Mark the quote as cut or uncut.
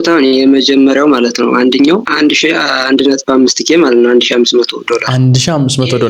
cut